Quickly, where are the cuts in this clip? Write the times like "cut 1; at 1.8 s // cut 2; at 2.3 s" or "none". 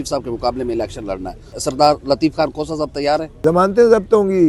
cut 1; at 1.5 s // cut 2; at 3.4 s